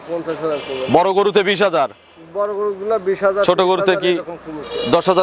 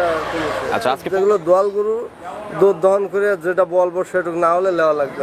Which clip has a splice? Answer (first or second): second